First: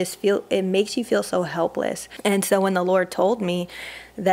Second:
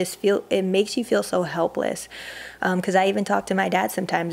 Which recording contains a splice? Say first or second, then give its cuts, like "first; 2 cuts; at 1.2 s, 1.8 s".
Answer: first; 1 cut; at 2.1 s